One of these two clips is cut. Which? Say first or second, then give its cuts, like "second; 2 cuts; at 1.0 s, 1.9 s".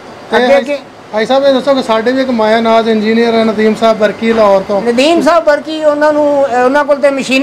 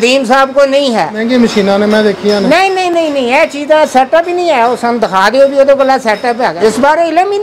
second; 2 cuts; at 1.2 s, 6.5 s